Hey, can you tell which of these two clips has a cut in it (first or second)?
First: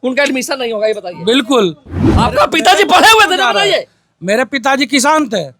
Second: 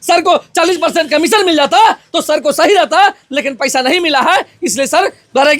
first